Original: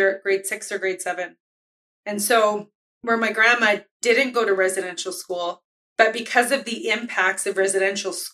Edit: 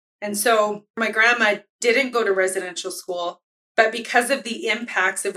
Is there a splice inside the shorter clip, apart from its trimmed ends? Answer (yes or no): yes